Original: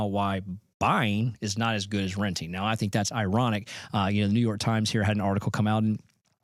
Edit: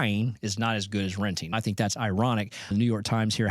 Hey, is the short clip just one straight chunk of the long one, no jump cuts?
no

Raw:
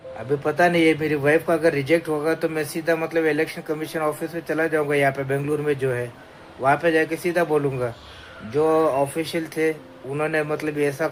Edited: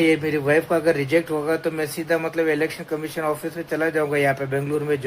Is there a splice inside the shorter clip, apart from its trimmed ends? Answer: no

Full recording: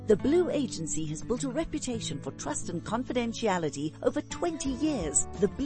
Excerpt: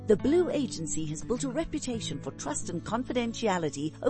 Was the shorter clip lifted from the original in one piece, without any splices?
yes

